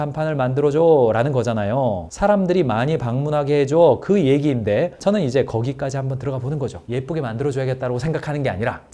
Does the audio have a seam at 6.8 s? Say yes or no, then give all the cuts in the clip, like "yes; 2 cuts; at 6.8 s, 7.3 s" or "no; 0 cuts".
yes; 1 cut; at 6.8 s